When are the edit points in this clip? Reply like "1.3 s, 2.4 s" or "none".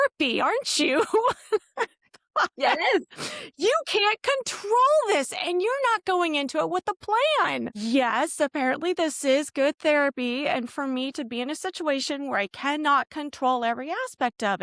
none